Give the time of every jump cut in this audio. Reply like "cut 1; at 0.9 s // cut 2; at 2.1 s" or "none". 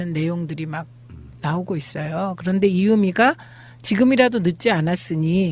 cut 1; at 3.1 s